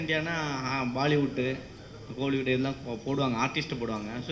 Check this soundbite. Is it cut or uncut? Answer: uncut